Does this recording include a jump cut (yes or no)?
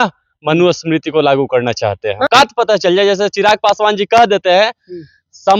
yes